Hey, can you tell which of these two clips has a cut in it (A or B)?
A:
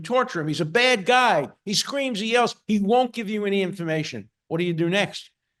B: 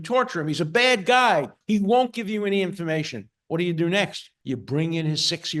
B